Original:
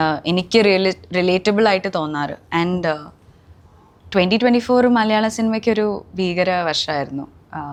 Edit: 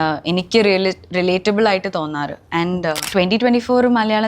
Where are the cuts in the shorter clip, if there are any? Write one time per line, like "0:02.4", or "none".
0:03.0